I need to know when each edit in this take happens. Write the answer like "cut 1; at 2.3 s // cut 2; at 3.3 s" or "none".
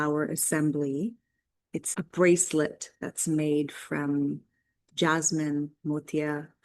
cut 1; at 1.9 s